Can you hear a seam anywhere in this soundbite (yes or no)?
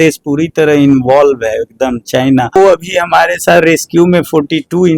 yes